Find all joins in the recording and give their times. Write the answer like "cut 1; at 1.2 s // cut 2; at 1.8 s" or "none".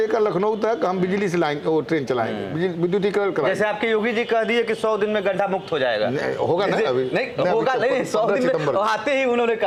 none